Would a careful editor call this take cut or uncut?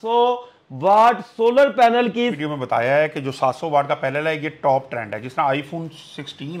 cut